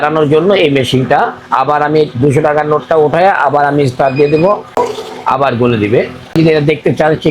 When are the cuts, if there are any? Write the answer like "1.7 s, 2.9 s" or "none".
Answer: 4.8 s, 6.3 s